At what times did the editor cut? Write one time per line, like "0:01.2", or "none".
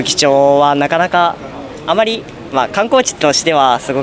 none